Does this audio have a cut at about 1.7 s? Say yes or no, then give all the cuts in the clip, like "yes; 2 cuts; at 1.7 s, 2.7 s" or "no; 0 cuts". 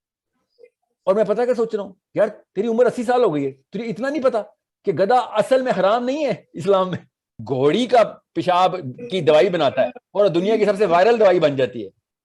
no; 1 cut; at 7.4 s